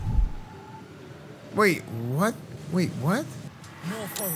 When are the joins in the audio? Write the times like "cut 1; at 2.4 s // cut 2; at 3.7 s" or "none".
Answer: cut 1; at 1.4 s // cut 2; at 2.5 s // cut 3; at 3.5 s